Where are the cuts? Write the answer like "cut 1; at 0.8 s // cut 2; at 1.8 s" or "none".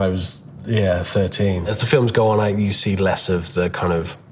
cut 1; at 1.7 s